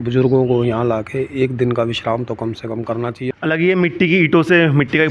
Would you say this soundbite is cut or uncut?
cut